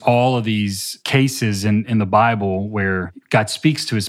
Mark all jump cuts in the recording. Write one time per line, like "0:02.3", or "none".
0:00.9
0:01.9
0:03.1